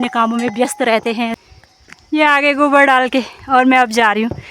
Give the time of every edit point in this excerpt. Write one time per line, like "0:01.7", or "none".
0:01.4